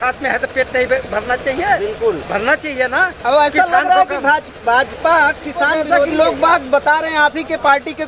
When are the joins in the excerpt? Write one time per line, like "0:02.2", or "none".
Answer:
0:05.8